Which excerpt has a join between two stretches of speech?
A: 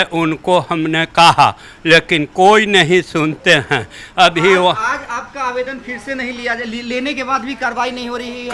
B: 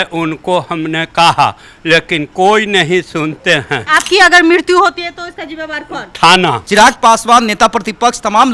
B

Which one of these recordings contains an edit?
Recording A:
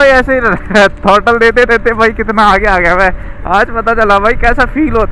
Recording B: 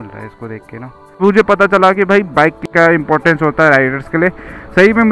B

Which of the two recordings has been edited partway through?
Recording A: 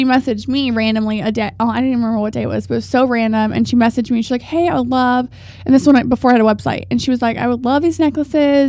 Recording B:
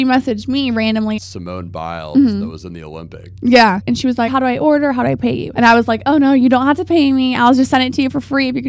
B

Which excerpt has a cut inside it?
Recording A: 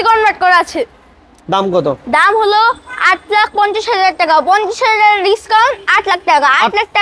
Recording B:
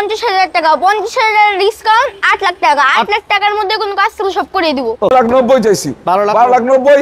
B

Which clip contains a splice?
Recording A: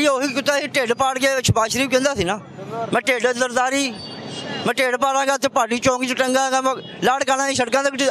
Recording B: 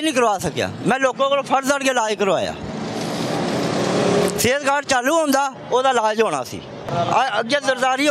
B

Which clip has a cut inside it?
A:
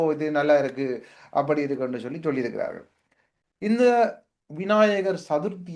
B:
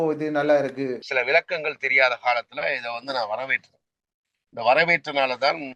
B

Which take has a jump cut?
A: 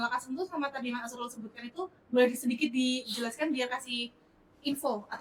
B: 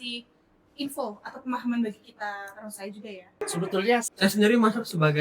B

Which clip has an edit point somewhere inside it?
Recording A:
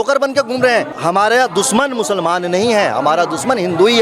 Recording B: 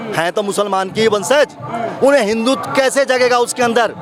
A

